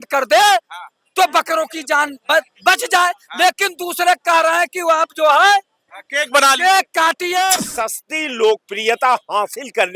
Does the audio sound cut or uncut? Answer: cut